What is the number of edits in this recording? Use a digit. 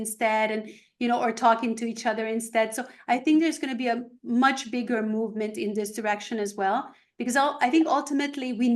0